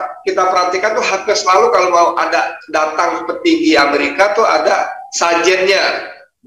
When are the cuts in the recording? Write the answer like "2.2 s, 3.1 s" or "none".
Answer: none

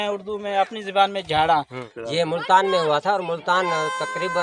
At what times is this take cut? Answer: 1.8 s

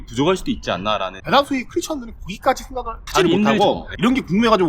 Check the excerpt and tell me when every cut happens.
1.2 s, 3.9 s

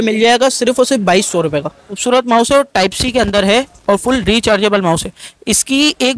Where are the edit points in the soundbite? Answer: 2.0 s

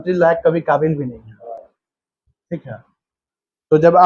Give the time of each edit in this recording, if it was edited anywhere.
none

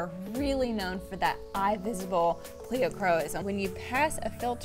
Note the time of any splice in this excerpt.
3.4 s

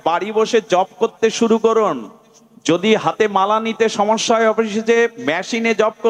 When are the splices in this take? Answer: none

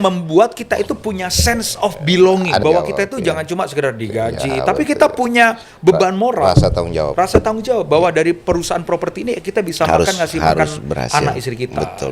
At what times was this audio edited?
2.6 s

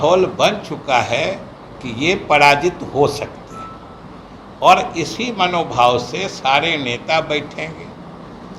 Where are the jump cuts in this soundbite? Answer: none

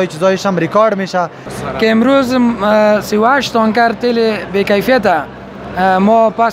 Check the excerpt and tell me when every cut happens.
1.5 s

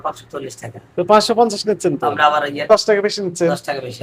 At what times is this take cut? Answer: 2.7 s

